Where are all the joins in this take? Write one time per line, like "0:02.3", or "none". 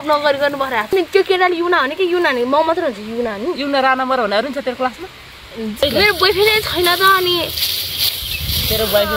0:00.9
0:05.8